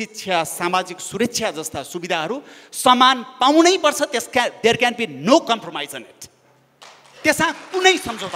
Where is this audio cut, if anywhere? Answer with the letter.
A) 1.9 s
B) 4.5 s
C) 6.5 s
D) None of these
D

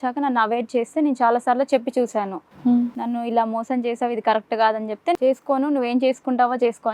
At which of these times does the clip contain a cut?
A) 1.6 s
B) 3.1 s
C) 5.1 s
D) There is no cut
C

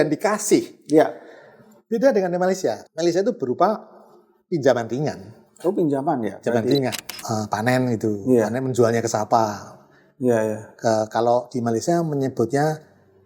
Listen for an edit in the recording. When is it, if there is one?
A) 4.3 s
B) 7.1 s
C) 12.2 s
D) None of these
B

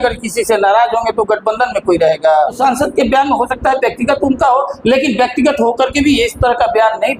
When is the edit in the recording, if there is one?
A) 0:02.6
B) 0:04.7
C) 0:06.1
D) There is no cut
A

